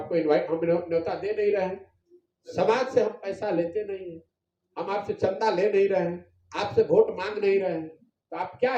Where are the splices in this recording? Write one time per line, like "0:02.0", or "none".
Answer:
none